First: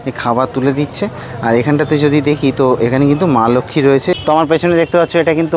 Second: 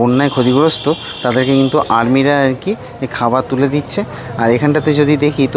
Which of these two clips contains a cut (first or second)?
first